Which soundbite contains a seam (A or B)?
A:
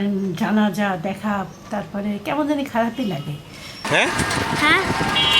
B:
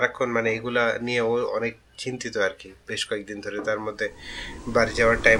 A